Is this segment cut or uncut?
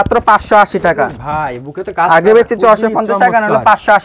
uncut